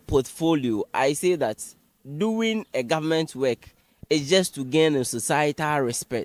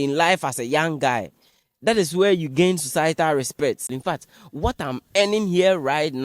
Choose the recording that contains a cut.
second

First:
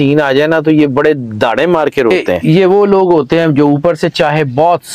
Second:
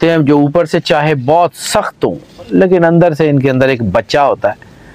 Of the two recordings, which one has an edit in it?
first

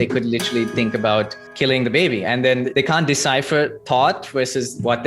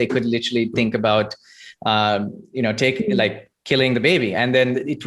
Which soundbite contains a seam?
first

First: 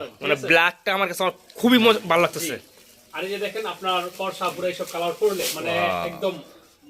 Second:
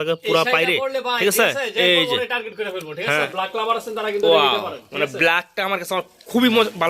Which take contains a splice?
second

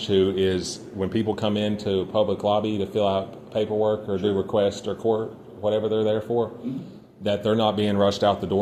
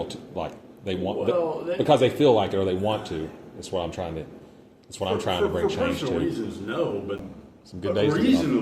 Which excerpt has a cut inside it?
second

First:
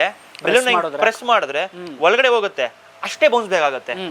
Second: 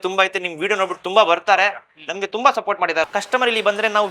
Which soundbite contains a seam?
second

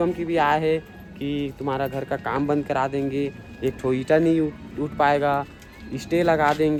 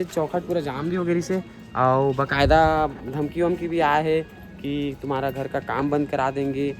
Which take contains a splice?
second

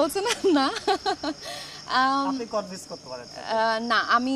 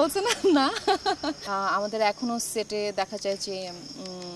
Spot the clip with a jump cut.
second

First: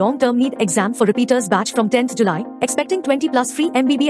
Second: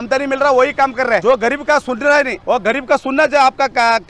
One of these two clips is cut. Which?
second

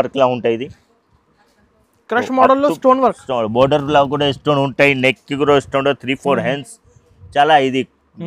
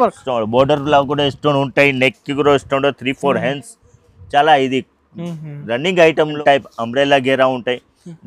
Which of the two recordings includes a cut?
second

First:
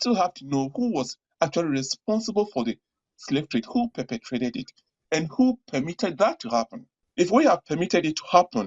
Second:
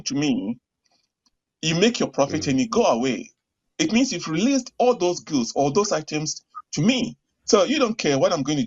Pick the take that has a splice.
first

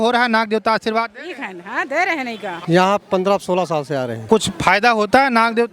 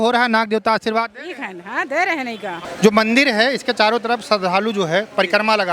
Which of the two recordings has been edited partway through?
first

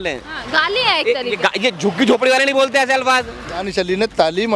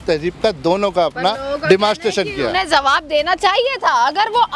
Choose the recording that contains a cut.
first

